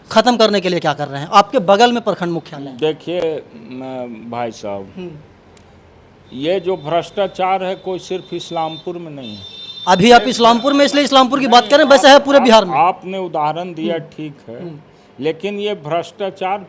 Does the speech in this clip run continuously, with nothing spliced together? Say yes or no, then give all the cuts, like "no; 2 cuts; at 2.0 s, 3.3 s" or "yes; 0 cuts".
yes; 0 cuts